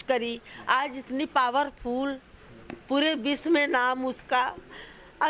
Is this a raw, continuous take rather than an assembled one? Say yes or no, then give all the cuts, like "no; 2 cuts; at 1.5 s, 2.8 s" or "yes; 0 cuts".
yes; 0 cuts